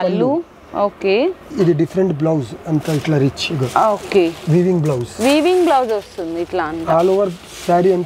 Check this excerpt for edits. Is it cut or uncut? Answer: uncut